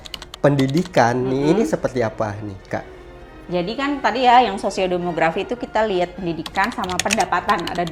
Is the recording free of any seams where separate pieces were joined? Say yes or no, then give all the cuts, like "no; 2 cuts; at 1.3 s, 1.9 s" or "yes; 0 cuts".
yes; 0 cuts